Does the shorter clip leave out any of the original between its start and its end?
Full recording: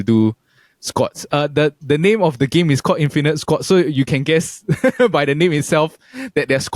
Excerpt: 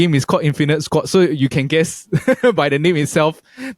no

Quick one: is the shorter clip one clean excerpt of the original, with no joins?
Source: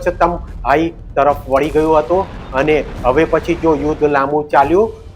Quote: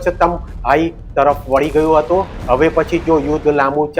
no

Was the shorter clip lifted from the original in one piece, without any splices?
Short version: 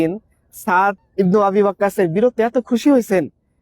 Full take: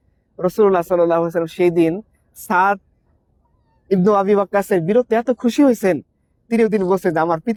no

